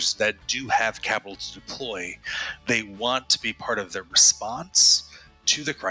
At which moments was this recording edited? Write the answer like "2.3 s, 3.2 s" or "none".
none